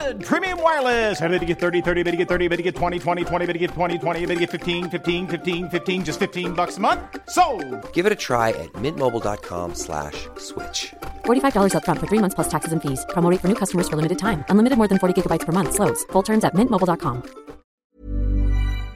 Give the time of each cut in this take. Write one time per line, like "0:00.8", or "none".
0:17.8